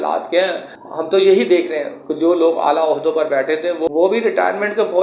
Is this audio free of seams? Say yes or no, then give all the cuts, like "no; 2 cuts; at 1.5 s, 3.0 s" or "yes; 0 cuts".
yes; 0 cuts